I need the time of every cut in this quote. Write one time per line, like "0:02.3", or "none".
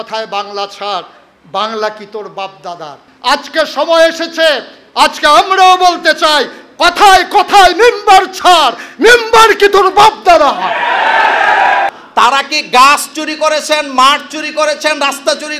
0:03.0
0:11.9